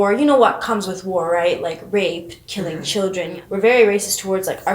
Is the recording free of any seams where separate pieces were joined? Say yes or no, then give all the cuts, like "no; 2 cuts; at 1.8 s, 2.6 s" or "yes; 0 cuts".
no; 1 cut; at 3.4 s